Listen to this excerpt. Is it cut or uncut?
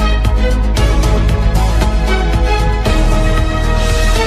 uncut